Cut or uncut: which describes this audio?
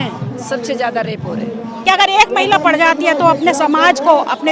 cut